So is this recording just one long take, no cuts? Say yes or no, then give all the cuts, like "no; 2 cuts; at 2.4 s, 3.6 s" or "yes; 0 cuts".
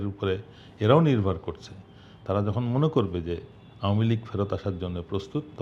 yes; 0 cuts